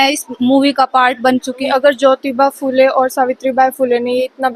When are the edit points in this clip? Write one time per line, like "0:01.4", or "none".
0:01.6